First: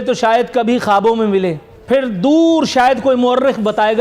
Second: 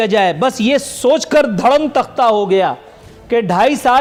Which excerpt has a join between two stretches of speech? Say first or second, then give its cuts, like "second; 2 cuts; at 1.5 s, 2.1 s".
first; 1 cut; at 1.7 s